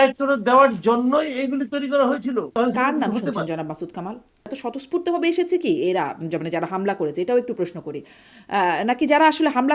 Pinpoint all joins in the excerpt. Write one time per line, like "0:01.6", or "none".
0:02.5
0:04.6